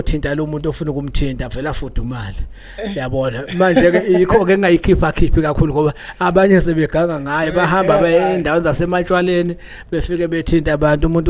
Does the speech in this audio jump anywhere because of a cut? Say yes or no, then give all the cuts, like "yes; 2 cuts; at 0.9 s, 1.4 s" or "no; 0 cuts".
no; 0 cuts